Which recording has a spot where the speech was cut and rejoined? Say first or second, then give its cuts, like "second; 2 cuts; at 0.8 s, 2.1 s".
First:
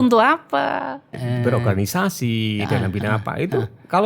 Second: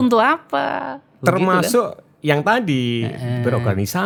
first; 1 cut; at 1.1 s